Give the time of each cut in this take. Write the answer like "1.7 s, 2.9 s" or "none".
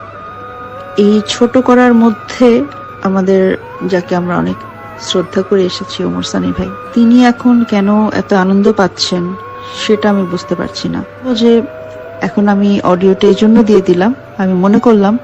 2.8 s, 3.7 s, 6.8 s, 11.3 s